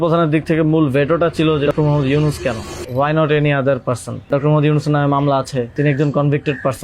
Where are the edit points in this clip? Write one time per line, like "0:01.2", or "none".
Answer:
0:01.7
0:02.8
0:04.3
0:05.7